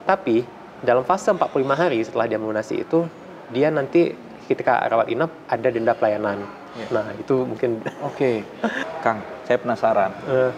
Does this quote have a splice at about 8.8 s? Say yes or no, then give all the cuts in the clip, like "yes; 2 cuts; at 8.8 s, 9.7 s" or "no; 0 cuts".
yes; 1 cut; at 8.8 s